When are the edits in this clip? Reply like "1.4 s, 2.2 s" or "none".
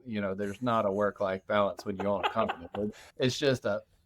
3.0 s